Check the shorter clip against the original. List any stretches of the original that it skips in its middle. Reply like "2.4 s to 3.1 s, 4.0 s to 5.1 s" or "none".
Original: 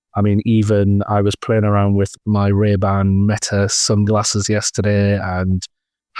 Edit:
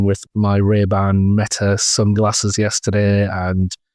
none